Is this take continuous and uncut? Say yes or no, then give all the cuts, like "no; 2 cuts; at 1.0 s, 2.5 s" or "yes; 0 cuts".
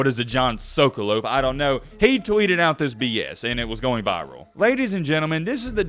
no; 1 cut; at 4.4 s